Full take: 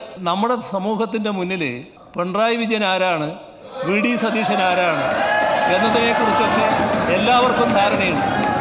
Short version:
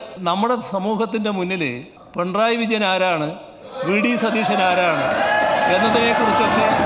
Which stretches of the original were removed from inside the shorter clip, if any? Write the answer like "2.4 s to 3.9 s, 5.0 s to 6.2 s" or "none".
none